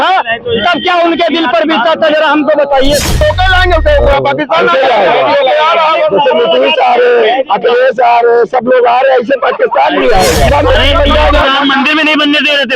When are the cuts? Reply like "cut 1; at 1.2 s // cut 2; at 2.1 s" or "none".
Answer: cut 1; at 3.2 s // cut 2; at 10.5 s